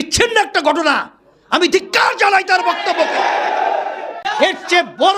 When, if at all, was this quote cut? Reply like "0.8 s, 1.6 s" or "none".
4.2 s